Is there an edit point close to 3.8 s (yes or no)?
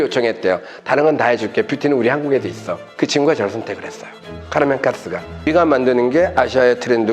no